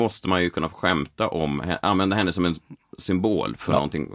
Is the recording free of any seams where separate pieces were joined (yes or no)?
yes